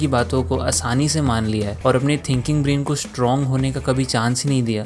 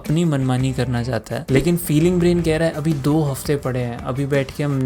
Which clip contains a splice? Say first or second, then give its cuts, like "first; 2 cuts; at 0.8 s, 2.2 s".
second; 1 cut; at 1.4 s